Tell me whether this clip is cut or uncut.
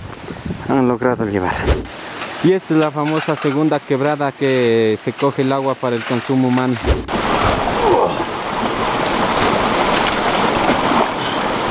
cut